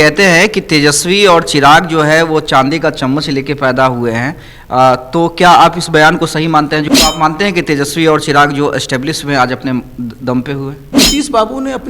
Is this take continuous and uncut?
no; 2 cuts; at 6.9 s, 10.8 s

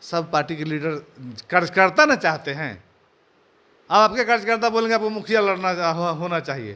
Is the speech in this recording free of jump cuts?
yes; 0 cuts

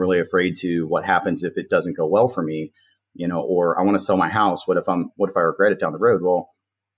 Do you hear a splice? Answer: no; 0 cuts

